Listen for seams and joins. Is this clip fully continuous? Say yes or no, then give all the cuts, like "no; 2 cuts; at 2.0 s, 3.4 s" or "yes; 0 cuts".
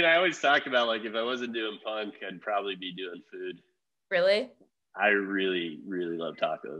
yes; 0 cuts